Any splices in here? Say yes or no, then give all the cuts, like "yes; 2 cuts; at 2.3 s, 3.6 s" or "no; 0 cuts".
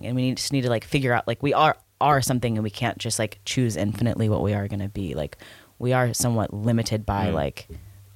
no; 0 cuts